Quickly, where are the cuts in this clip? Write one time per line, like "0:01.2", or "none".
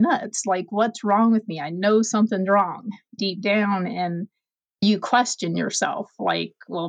0:03.2
0:04.8